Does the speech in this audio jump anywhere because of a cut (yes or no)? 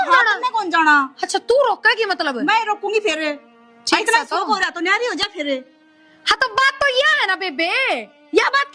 no